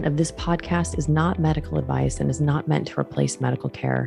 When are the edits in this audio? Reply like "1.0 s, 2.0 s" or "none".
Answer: none